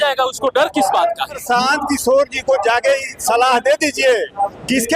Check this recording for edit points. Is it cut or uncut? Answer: cut